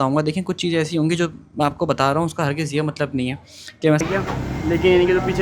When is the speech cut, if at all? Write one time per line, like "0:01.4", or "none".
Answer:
0:04.0